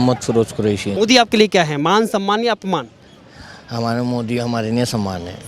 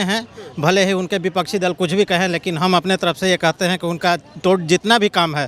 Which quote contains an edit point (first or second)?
first